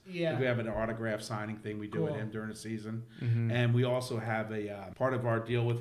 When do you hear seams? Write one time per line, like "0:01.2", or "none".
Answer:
0:04.8